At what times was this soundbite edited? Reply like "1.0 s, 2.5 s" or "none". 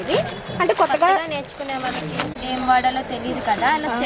2.3 s